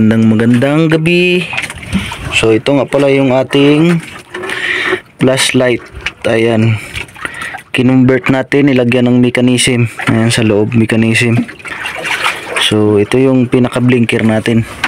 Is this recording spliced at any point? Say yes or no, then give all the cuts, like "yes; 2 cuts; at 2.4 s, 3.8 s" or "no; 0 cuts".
no; 0 cuts